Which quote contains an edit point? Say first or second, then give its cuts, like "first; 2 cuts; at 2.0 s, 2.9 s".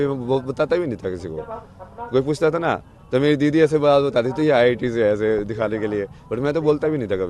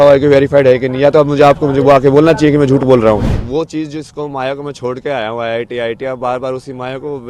second; 1 cut; at 3.4 s